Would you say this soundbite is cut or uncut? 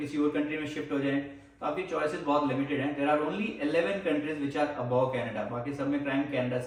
uncut